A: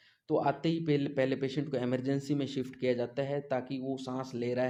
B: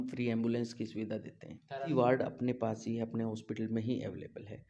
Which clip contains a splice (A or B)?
B